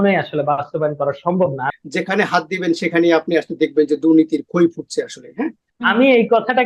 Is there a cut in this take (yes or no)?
yes